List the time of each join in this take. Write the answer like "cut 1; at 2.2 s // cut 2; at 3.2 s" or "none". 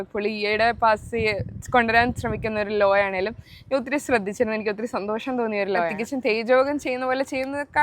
cut 1; at 6.0 s